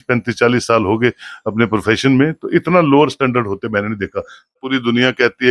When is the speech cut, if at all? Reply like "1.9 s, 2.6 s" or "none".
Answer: 4.5 s